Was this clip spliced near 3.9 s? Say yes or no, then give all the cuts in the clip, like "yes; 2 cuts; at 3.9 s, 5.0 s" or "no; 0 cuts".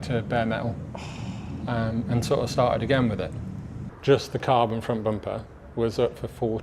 yes; 1 cut; at 3.9 s